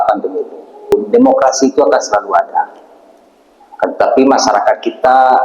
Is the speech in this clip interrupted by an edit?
yes; 1 cut; at 0.9 s

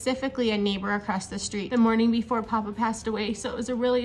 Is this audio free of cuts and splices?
no; 1 cut; at 1.7 s

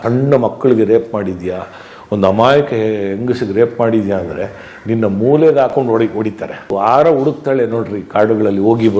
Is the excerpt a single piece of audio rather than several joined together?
no; 1 cut; at 6.7 s

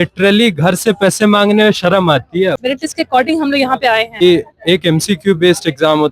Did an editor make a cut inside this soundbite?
yes; 2 cuts; at 2.6 s, 4.2 s

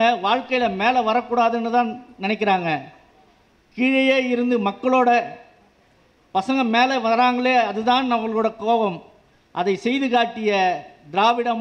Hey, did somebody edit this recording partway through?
no; 0 cuts

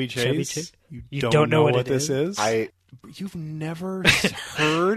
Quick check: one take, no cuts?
no; 1 cut; at 2.7 s

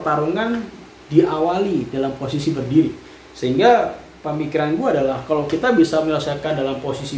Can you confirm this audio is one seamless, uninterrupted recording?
yes; 0 cuts

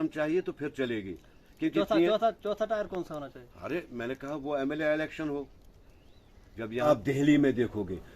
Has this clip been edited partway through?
yes; 1 cut; at 6.9 s

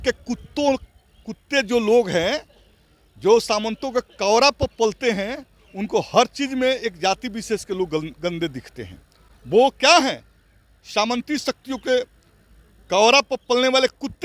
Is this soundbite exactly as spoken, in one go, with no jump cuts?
yes; 0 cuts

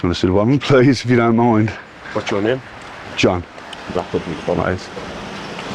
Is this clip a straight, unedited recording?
yes; 0 cuts

